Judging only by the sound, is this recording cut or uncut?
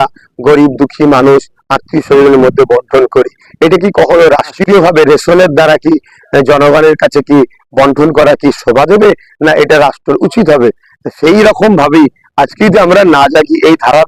uncut